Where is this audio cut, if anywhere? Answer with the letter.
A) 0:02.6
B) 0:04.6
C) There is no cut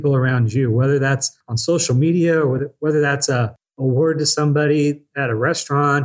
A